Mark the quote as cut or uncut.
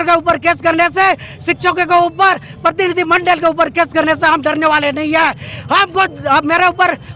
uncut